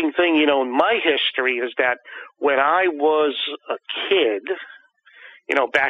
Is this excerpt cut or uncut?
uncut